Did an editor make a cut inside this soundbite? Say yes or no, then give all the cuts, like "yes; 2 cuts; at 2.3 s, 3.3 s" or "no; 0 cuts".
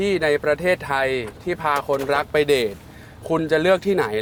no; 0 cuts